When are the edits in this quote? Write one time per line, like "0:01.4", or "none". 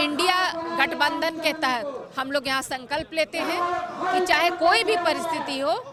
none